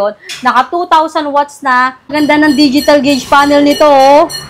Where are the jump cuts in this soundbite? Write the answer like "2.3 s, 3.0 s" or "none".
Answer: 2.0 s